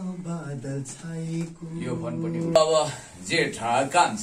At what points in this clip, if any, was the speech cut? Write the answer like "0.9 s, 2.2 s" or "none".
2.6 s